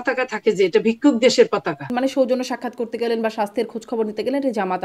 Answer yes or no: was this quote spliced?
yes